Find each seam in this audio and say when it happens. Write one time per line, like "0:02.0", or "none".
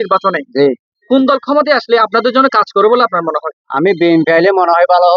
none